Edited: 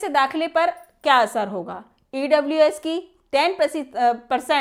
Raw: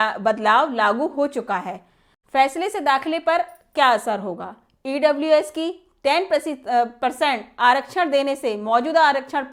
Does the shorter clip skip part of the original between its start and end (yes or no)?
no